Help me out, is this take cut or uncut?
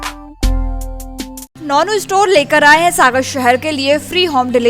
cut